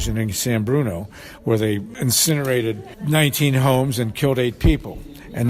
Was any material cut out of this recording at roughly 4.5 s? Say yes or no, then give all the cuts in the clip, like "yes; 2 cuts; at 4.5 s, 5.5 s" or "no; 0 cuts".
no; 2 cuts; at 1.9 s, 2.9 s